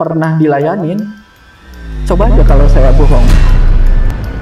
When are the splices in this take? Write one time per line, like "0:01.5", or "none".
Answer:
none